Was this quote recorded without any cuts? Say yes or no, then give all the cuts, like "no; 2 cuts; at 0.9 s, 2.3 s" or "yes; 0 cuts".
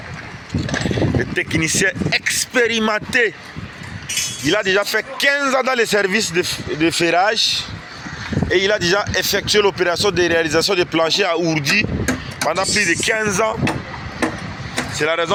yes; 0 cuts